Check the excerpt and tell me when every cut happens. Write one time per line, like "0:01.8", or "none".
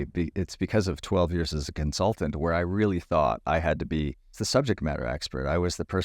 0:04.4